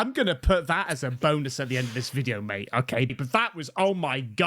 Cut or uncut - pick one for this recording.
cut